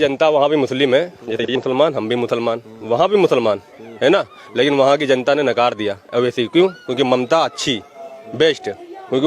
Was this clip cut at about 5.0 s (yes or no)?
no